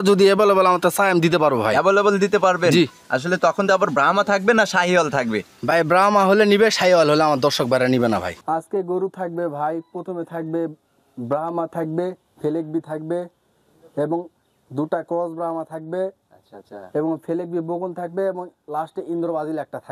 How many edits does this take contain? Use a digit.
1